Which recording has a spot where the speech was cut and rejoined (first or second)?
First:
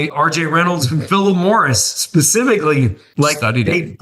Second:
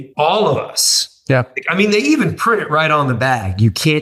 first